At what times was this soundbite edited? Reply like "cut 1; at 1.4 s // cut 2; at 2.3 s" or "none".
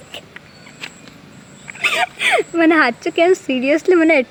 none